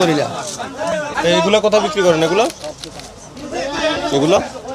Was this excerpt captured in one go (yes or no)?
no